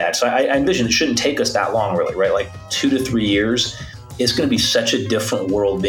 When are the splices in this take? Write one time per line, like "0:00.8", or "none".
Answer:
none